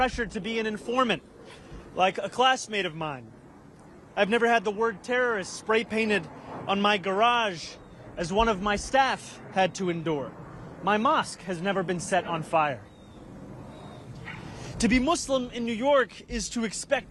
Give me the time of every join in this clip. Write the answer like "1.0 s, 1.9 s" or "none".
none